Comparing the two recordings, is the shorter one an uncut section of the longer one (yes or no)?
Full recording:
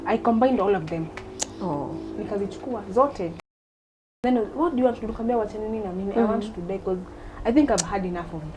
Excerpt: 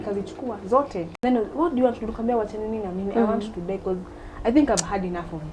no